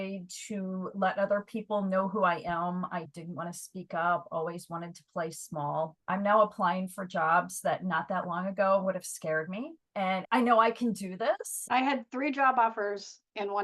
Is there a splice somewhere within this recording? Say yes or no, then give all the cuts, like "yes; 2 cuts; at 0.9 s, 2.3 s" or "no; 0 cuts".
yes; 3 cuts; at 6.0 s, 10.1 s, 11.5 s